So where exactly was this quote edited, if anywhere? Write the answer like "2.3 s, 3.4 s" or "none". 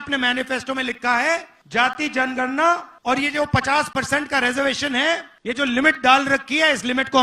1.6 s, 2.9 s, 5.3 s